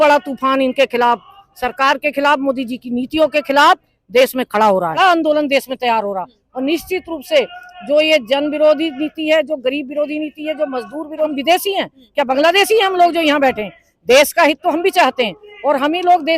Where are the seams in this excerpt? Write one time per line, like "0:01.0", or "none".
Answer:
0:05.0
0:11.3